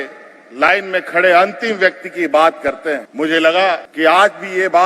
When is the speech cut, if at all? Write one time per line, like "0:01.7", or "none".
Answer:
0:03.1
0:03.9